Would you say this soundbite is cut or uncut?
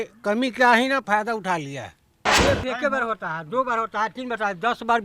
cut